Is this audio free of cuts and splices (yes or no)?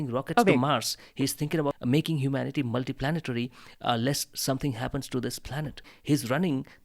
no